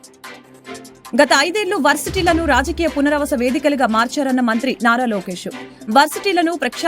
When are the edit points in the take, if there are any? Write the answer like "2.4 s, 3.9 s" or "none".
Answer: 1.1 s